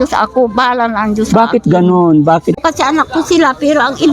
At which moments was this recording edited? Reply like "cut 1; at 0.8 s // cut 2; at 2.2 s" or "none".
cut 1; at 2.6 s